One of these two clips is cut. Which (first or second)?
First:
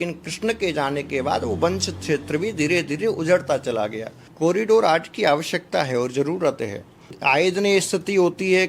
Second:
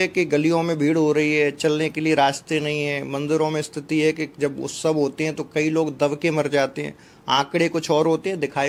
first